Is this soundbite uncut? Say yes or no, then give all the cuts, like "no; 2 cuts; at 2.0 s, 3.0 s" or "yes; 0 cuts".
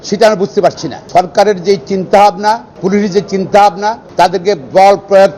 no; 3 cuts; at 0.9 s, 2.7 s, 4.0 s